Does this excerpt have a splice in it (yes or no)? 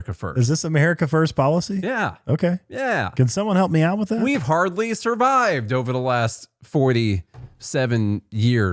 no